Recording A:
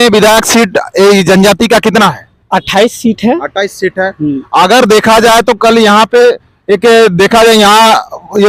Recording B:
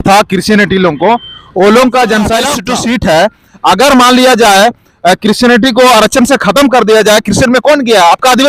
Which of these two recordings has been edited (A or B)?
B